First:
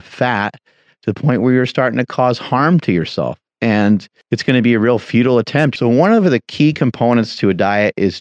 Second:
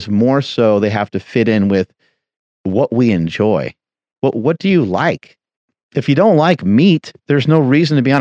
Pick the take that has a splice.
first; 2 cuts; at 4.1 s, 5.7 s

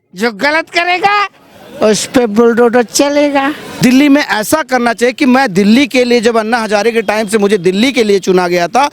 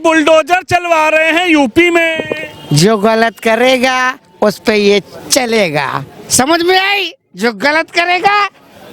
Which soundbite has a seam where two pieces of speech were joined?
first; 1 cut; at 3.7 s

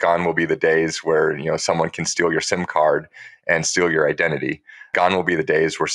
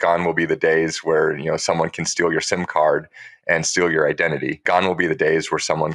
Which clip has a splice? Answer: second; 1 cut; at 4.5 s

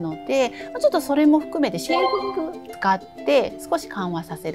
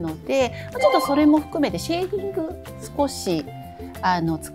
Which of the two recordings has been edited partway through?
first; 1 cut; at 2.7 s

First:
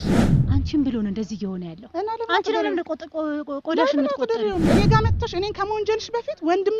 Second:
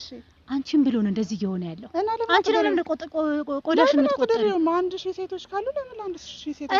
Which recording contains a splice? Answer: first; 1 cut; at 4.7 s

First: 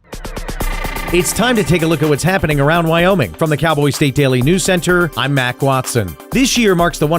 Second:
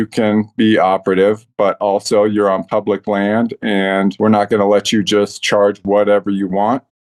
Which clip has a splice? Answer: first; 1 cut; at 1.0 s

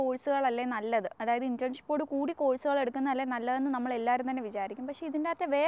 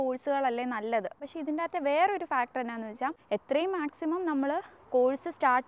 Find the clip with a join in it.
second; 2 cuts; at 1.1 s, 3.2 s

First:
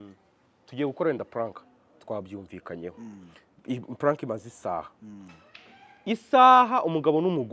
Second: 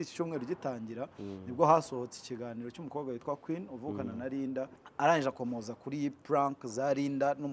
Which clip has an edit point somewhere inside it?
second; 1 cut; at 4.8 s

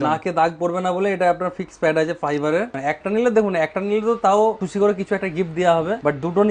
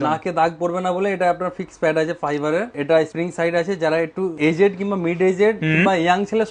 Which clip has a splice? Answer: first; 1 cut; at 2.7 s

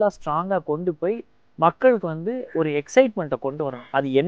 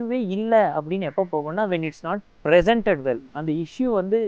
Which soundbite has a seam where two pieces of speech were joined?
second; 1 cut; at 3.3 s

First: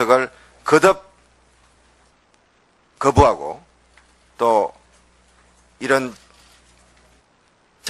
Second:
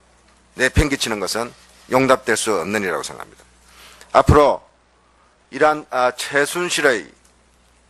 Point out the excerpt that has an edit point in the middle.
first; 1 cut; at 4.8 s

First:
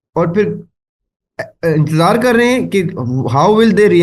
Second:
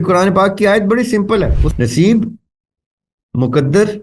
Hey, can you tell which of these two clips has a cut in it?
second; 1 cut; at 1.6 s

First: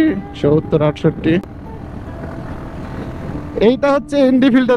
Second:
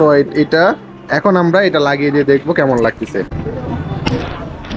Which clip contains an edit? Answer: second; 1 cut; at 3.4 s

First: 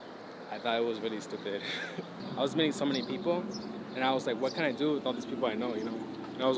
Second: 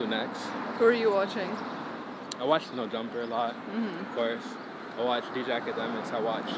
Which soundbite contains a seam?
first; 1 cut; at 2.2 s

